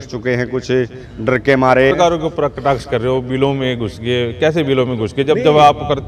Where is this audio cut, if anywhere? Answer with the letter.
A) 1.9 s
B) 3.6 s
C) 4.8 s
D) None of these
A